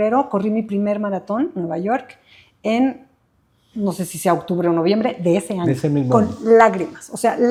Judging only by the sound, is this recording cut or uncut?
uncut